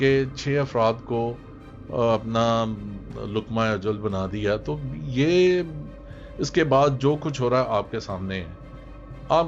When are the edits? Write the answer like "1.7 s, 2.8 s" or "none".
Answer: none